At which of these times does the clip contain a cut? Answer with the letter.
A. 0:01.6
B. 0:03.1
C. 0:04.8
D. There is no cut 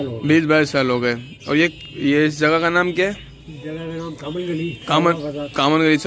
D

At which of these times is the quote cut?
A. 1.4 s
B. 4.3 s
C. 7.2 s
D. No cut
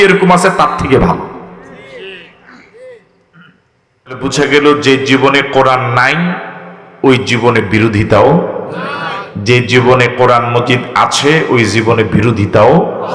B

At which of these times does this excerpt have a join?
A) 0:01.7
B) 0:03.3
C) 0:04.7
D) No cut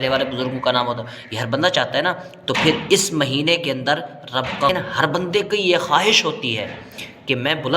C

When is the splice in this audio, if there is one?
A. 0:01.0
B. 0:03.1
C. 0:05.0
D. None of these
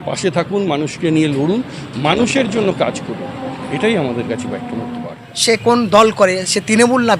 C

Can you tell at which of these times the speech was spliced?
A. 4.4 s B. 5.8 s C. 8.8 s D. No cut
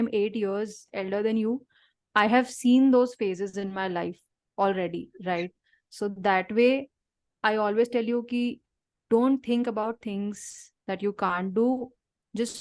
D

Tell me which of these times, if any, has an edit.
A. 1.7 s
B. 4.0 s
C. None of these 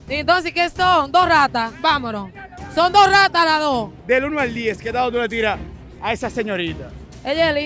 B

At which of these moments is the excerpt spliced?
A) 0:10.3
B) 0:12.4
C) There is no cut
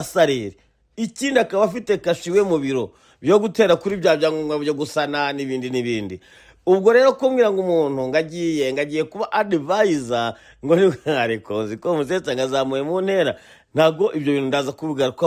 C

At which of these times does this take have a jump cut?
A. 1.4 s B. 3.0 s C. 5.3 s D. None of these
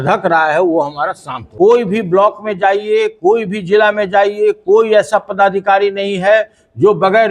A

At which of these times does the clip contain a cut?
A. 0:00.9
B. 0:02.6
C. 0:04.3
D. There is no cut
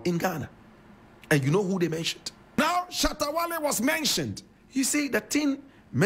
B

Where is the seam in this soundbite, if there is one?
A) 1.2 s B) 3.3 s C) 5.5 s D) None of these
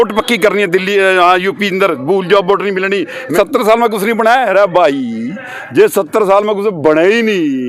B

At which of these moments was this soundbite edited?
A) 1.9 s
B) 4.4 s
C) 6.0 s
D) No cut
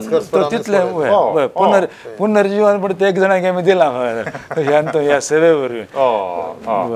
D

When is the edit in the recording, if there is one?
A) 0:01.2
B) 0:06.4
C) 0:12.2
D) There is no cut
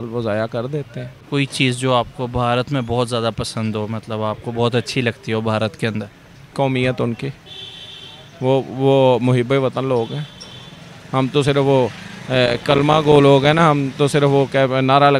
A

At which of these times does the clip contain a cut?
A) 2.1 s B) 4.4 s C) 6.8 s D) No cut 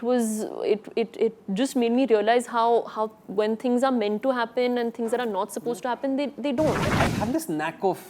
C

